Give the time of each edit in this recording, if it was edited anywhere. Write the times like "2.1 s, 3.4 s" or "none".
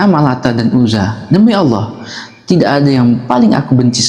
none